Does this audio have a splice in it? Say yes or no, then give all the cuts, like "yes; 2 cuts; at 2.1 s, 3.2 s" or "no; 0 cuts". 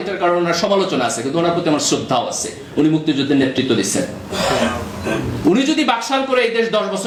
no; 0 cuts